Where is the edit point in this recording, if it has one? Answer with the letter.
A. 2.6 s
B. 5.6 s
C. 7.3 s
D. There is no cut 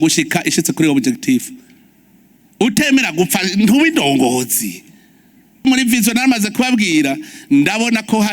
B